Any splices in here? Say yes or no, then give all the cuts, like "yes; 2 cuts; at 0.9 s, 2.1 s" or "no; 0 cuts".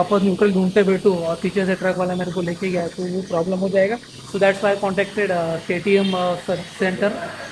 no; 0 cuts